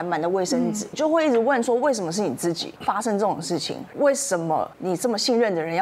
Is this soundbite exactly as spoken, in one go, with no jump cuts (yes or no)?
no